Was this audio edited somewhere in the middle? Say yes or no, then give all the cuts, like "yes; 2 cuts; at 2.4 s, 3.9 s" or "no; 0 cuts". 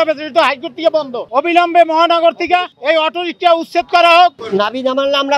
yes; 3 cuts; at 1.2 s, 2.7 s, 4.4 s